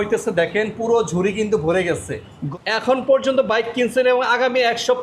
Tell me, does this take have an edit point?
no; 0 cuts

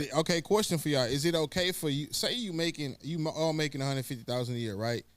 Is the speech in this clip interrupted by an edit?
no; 0 cuts

